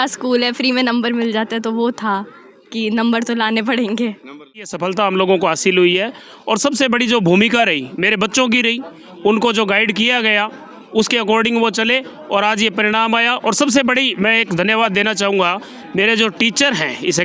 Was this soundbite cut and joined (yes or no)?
yes